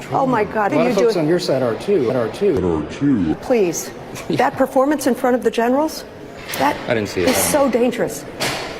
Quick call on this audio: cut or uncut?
cut